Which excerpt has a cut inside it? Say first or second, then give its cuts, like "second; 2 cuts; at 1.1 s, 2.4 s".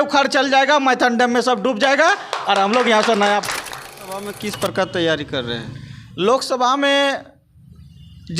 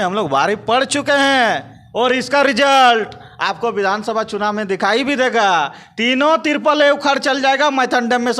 first; 1 cut; at 3.9 s